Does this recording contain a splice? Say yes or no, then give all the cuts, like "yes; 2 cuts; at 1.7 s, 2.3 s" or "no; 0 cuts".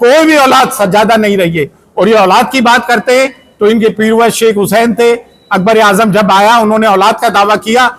no; 0 cuts